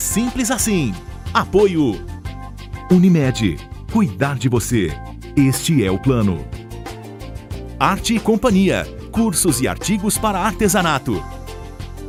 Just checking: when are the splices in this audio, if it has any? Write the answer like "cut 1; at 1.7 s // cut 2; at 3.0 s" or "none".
none